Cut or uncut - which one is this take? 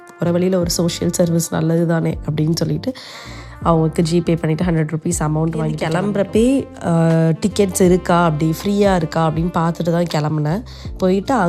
cut